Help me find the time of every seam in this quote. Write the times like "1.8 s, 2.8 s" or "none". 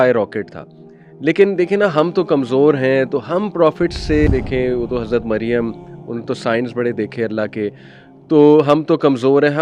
4.3 s